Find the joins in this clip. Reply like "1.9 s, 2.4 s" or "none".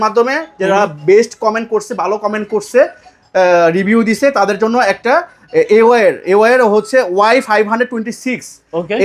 none